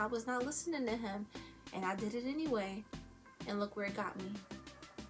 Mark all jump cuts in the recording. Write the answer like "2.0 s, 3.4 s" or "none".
none